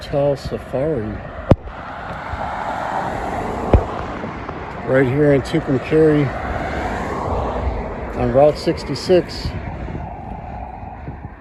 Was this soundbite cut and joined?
no; 0 cuts

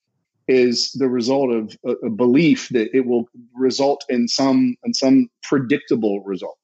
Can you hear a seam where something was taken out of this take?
no; 0 cuts

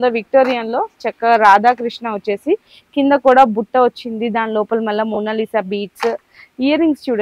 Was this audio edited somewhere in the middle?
no; 0 cuts

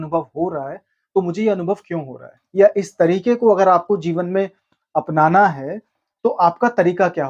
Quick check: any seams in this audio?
yes; 1 cut; at 2.3 s

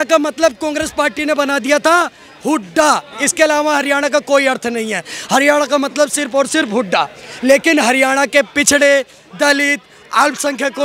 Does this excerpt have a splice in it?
no; 0 cuts

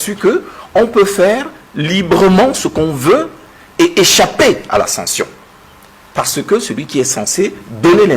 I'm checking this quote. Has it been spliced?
no; 0 cuts

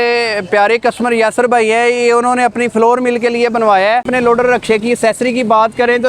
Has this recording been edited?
yes; 1 cut; at 4.0 s

